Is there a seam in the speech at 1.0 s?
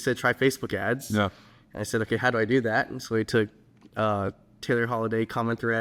no; 0 cuts

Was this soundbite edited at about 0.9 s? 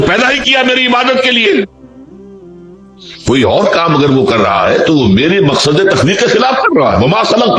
no; 0 cuts

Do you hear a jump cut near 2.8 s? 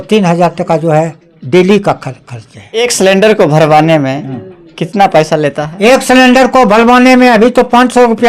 yes; 1 cut; at 2.8 s

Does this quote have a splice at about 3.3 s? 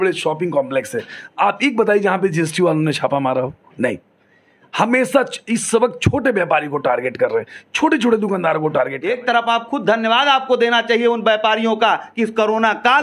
no; 1 cut; at 9.0 s

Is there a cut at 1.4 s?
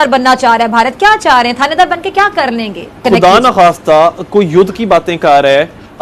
no; 1 cut; at 2.8 s

